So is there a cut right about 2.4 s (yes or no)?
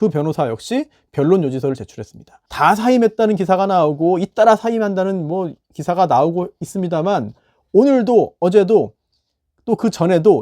yes